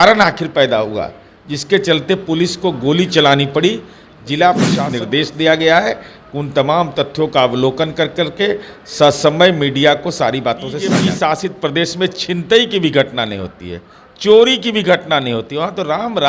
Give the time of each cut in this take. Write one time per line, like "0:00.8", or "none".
0:04.8
0:11.0

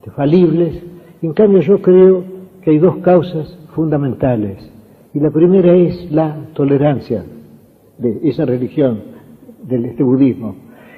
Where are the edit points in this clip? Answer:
0:03.4

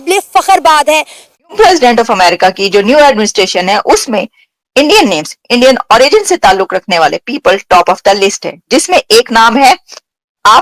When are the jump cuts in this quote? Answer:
0:01.2

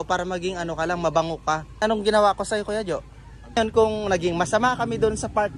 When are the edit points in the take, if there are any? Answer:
0:01.8
0:03.6

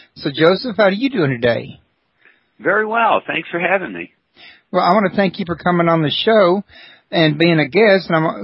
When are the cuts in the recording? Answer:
0:01.4

